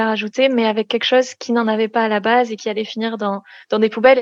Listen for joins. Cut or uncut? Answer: uncut